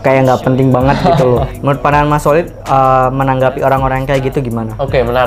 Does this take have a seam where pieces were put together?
yes; 1 cut; at 1.5 s

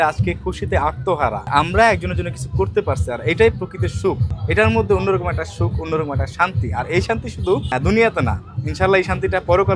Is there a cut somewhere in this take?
yes; 3 cuts; at 1.5 s, 4.3 s, 7.7 s

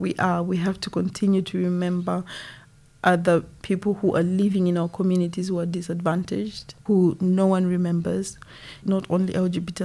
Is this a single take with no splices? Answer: no; 3 cuts; at 3.5 s, 6.7 s, 8.8 s

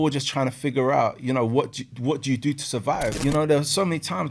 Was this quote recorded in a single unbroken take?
no; 1 cut; at 3.1 s

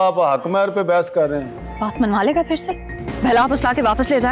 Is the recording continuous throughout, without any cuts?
no; 1 cut; at 1.6 s

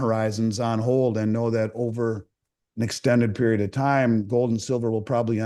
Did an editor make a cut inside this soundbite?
no; 0 cuts

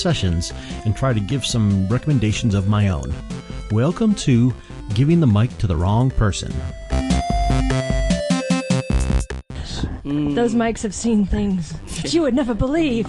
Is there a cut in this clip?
no; 0 cuts

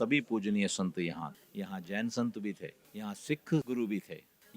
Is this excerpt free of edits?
no; 1 cut; at 3.6 s

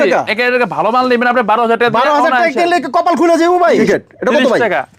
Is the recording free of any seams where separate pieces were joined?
no; 1 cut; at 3.8 s

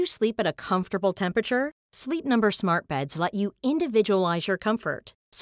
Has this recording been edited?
no; 0 cuts

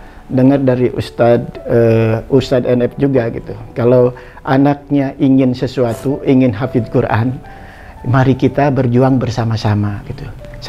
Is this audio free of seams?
yes; 0 cuts

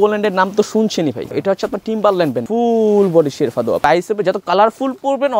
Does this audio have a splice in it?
yes; 3 cuts; at 1.3 s, 2.5 s, 3.8 s

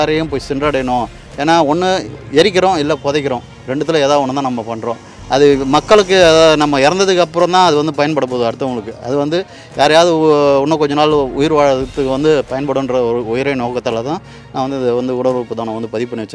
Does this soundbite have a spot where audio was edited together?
no; 0 cuts

